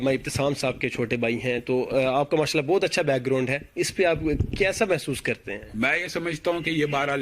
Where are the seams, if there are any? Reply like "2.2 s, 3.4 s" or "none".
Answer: none